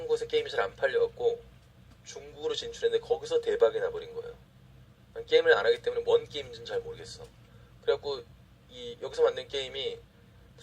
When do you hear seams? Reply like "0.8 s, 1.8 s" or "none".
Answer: 1.3 s